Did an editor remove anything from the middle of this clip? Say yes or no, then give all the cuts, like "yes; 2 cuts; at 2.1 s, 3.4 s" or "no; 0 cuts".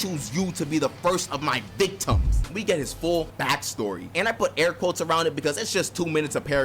yes; 1 cut; at 2.5 s